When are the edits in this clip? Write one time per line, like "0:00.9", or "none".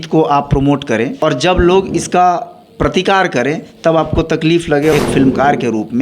0:01.1
0:04.9